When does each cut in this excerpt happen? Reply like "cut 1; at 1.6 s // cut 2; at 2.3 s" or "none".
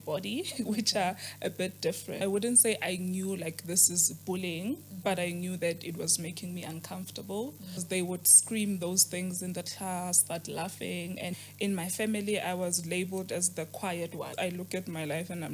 cut 1; at 2.1 s // cut 2; at 7.8 s // cut 3; at 10.2 s // cut 4; at 11.3 s // cut 5; at 14.3 s